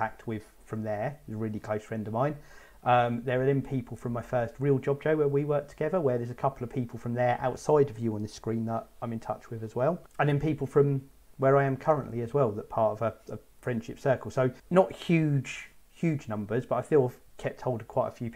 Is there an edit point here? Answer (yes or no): yes